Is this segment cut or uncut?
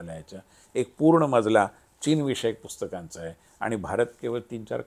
uncut